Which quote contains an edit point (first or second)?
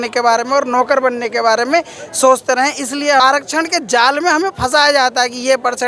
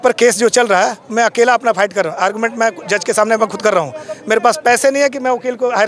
first